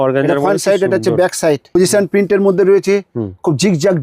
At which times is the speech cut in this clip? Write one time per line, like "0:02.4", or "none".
0:01.7